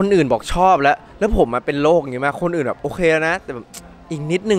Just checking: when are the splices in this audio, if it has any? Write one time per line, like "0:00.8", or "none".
none